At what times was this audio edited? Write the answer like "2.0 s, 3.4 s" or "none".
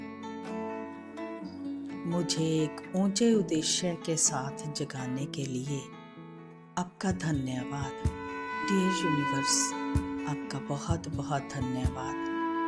1.4 s